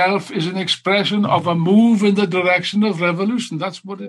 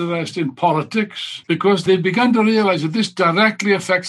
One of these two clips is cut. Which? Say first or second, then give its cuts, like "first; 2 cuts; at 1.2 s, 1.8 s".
second; 1 cut; at 1.7 s